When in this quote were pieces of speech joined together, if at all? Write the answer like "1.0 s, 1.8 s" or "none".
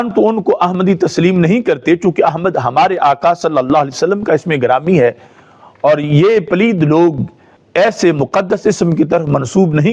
none